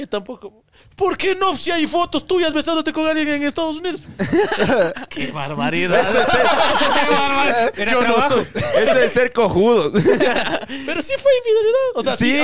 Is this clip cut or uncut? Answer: uncut